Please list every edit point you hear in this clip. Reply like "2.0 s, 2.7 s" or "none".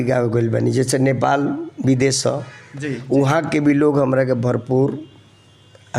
none